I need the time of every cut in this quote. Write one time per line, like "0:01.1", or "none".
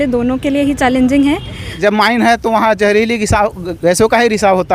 0:01.7